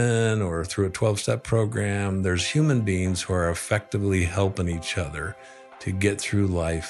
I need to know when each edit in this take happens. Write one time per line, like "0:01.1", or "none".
none

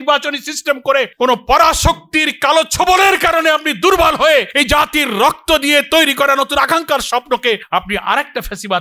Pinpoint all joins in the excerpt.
0:01.1
0:04.5
0:07.6

